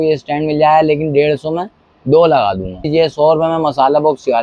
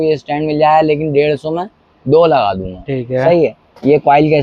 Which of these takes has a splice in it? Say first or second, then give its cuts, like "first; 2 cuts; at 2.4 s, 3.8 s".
first; 1 cut; at 2.9 s